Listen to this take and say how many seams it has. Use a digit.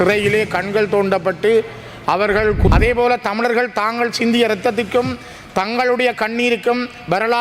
1